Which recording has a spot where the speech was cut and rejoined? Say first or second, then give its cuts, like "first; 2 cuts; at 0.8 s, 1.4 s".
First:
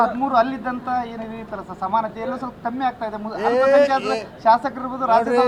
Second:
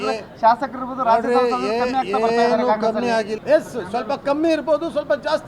second; 1 cut; at 3.3 s